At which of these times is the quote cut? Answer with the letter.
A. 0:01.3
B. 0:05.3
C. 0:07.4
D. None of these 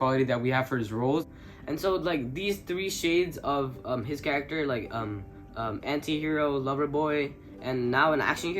A